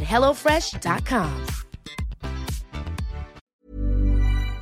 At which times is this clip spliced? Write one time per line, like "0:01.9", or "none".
0:03.4